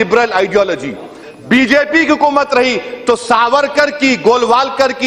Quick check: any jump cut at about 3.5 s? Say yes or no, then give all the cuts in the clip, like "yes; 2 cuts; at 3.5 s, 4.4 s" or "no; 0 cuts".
no; 0 cuts